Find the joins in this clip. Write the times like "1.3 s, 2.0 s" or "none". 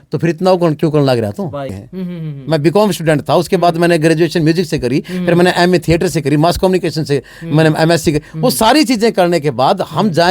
1.8 s